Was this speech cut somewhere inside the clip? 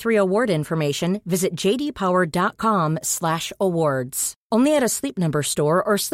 no; 0 cuts

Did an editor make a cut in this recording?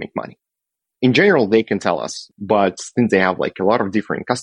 yes; 1 cut; at 2.3 s

